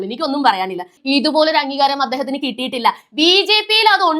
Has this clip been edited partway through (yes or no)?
yes